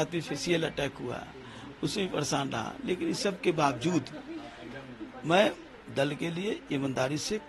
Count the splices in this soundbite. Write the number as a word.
zero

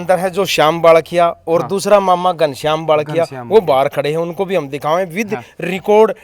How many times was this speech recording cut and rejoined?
zero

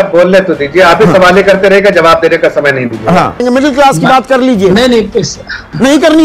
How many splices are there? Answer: one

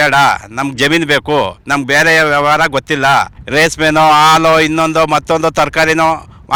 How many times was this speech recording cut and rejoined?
zero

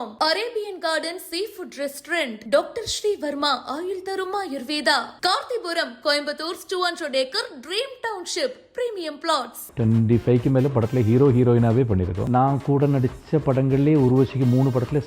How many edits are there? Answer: two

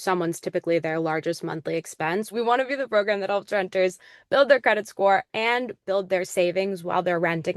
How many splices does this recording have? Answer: two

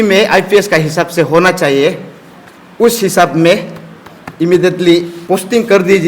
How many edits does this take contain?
one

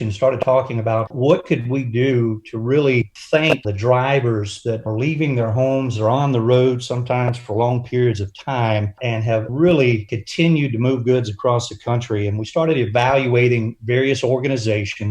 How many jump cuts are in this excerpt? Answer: one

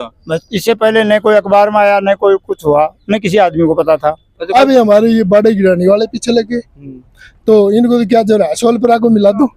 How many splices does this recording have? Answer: one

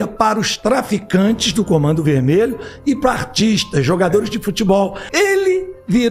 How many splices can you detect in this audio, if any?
one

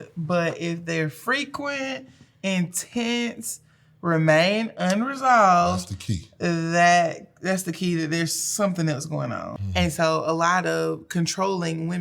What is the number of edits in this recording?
one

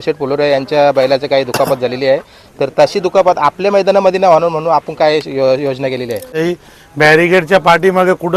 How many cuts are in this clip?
one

